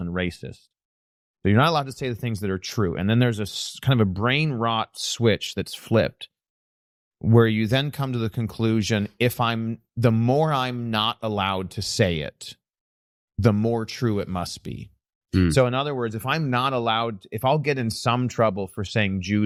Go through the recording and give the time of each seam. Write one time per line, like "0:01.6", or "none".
none